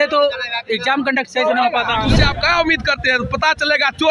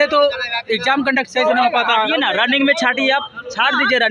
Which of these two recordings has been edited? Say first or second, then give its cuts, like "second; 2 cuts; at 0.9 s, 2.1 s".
first; 1 cut; at 2.1 s